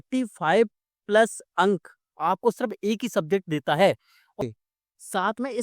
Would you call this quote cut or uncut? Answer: cut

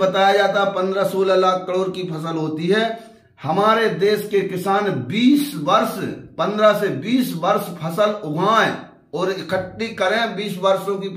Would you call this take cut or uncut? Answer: uncut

